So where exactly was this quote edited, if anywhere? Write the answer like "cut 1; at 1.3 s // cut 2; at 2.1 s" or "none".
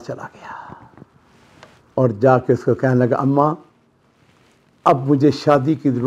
none